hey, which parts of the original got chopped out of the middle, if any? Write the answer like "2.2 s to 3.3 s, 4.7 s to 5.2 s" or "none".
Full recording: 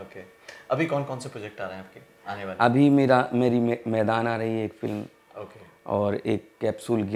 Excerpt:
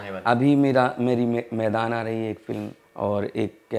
5.1 s to 5.7 s